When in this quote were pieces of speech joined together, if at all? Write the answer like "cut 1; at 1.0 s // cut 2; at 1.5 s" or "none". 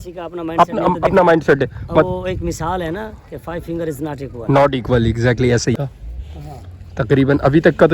cut 1; at 5.8 s